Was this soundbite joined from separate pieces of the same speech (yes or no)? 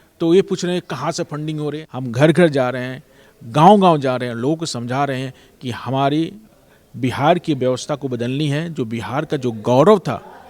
yes